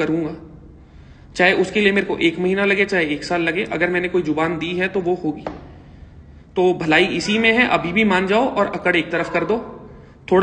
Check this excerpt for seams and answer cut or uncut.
uncut